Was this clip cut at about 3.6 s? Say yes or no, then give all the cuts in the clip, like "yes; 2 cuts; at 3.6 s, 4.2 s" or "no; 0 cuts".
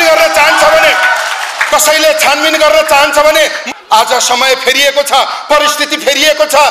yes; 1 cut; at 3.6 s